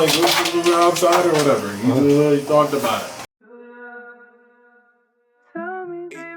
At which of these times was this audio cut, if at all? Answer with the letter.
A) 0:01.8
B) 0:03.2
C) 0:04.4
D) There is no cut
B